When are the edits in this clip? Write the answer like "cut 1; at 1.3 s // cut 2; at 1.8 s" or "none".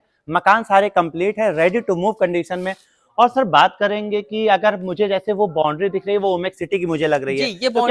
none